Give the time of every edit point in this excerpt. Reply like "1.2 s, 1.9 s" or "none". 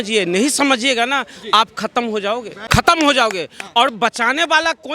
2.5 s